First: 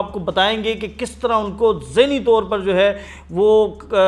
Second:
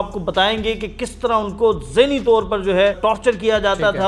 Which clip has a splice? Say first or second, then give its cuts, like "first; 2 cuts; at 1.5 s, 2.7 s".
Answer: second; 1 cut; at 3.0 s